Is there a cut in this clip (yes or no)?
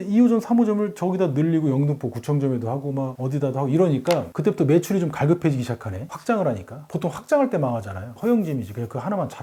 no